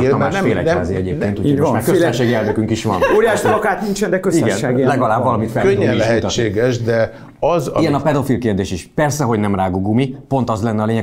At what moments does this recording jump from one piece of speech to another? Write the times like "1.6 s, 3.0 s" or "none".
none